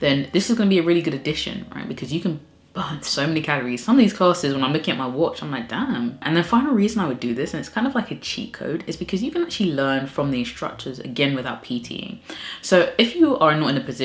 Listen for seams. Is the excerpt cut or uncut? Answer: uncut